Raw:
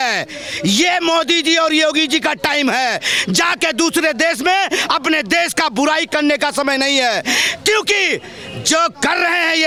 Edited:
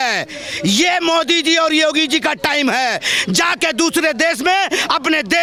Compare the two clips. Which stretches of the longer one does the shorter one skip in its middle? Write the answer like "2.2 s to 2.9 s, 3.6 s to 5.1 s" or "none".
none